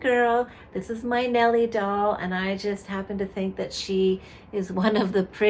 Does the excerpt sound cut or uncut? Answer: uncut